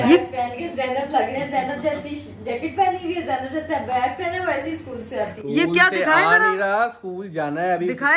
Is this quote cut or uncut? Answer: uncut